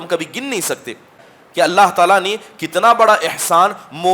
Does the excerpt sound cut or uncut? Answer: cut